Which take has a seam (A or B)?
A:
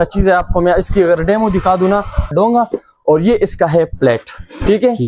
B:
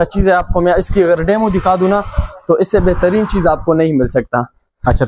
A